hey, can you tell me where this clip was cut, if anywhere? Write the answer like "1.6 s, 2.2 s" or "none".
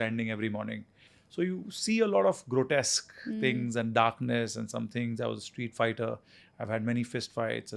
none